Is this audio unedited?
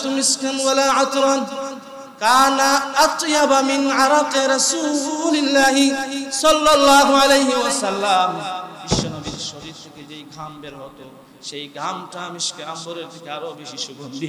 yes; 0 cuts

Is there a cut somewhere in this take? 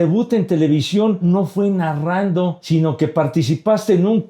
yes; 2 cuts; at 1.2 s, 2.6 s

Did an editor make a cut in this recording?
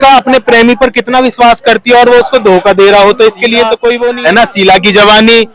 yes; 1 cut; at 4.1 s

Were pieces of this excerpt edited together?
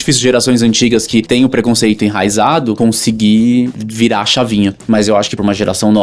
yes; 3 cuts; at 1.3 s, 2.8 s, 3.7 s

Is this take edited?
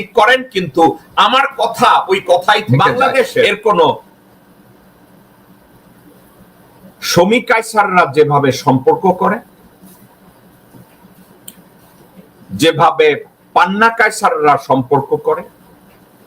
yes; 1 cut; at 4.2 s

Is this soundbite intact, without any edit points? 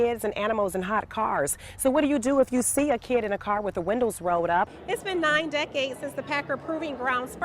no; 1 cut; at 4.8 s

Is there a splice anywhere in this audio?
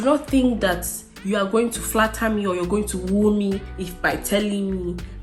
no; 0 cuts

